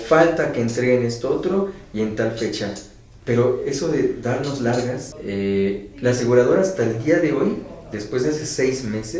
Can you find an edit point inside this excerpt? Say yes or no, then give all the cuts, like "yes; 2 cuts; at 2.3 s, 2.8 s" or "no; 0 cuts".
yes; 1 cut; at 5.1 s